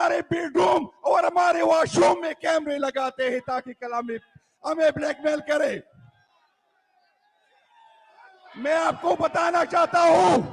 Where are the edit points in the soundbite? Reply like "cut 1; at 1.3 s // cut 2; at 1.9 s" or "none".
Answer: none